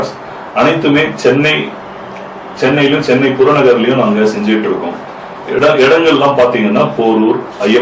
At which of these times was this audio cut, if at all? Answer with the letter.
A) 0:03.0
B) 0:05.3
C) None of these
C